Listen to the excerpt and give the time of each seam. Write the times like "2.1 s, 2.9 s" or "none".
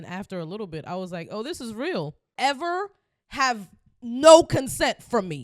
2.3 s